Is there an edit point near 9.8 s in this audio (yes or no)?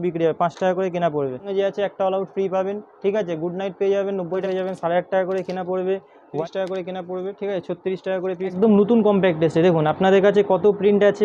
no